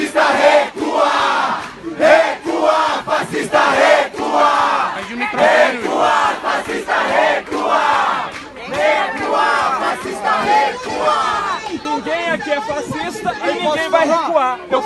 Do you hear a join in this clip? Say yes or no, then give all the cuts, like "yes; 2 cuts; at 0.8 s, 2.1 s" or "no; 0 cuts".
no; 0 cuts